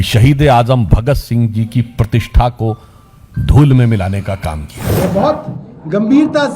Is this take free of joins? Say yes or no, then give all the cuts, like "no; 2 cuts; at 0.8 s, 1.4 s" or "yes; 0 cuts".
no; 1 cut; at 4.8 s